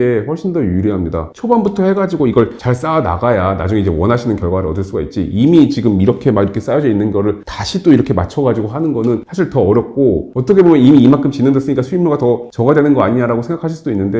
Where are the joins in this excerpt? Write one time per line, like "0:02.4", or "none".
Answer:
0:01.2